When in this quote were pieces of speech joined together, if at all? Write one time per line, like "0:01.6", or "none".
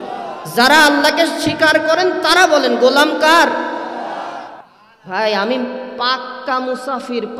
0:04.5